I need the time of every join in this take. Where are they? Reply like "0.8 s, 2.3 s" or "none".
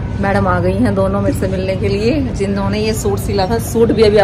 none